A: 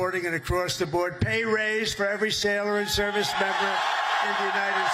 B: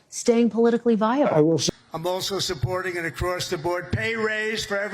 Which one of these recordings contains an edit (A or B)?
B